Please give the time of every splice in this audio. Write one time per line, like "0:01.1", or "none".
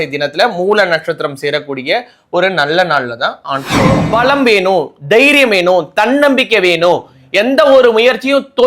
0:04.0